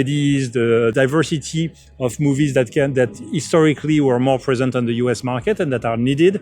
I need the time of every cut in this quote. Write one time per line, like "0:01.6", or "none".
0:00.9